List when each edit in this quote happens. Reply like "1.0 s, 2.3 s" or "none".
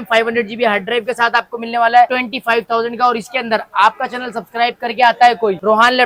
none